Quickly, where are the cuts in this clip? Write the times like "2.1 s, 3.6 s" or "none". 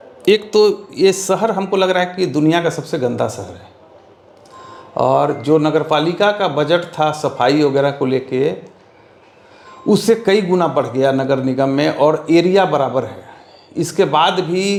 none